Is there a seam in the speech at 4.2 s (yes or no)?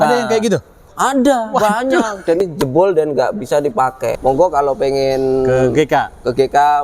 yes